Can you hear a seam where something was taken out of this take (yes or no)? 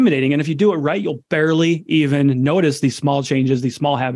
no